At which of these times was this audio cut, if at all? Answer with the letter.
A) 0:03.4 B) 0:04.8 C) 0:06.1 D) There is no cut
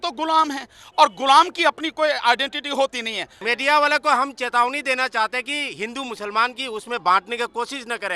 A